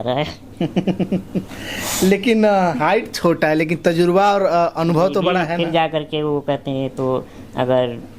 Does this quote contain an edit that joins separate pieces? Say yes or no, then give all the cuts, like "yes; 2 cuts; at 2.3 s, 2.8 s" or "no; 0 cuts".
no; 0 cuts